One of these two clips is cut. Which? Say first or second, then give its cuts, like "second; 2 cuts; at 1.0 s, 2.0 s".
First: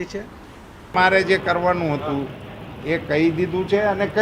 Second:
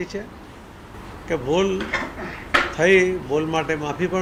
first; 1 cut; at 0.9 s